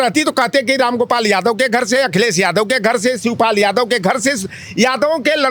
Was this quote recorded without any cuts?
yes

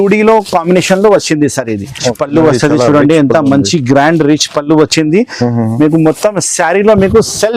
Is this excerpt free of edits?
no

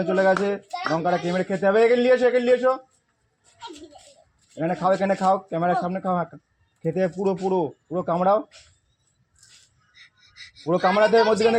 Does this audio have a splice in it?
no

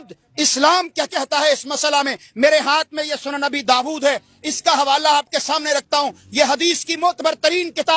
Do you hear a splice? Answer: no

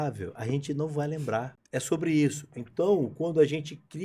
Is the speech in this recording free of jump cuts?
no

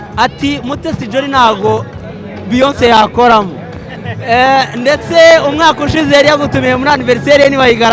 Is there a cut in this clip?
no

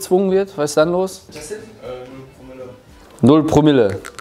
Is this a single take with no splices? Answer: yes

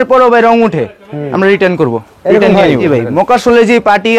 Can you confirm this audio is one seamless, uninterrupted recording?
no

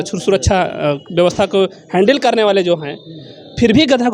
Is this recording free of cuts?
yes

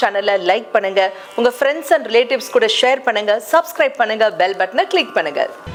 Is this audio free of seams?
yes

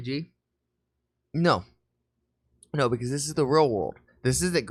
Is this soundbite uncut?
yes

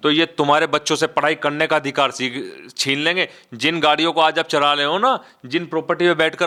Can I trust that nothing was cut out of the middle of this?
yes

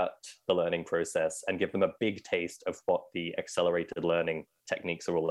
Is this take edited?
no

